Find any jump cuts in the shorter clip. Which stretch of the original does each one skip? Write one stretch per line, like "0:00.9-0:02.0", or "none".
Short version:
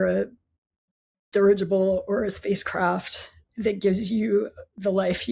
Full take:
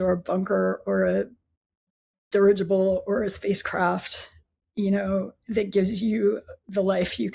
0:04.5-0:05.4